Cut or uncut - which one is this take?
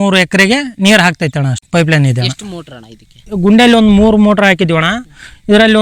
uncut